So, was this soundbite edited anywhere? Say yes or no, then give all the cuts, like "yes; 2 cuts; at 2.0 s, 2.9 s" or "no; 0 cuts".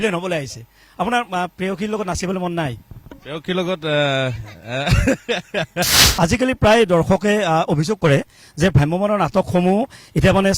yes; 1 cut; at 6.0 s